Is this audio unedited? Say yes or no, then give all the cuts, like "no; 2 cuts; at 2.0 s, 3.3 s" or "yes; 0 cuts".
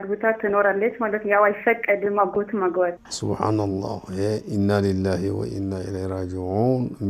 no; 1 cut; at 3.1 s